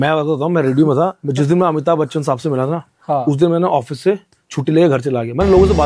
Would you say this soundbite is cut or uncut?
uncut